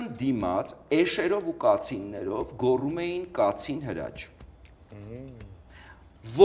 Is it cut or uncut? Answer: uncut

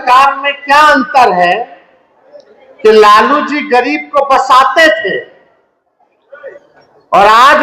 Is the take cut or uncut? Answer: uncut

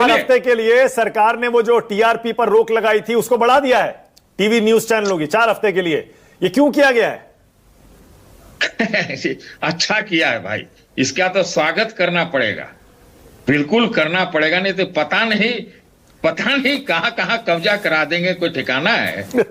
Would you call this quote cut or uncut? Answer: uncut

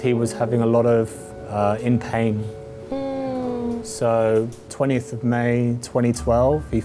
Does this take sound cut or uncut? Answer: uncut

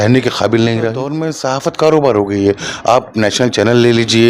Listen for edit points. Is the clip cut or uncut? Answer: cut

